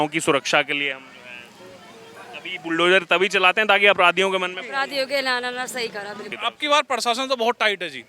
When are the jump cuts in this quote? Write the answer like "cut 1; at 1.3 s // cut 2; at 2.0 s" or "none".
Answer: cut 1; at 6.3 s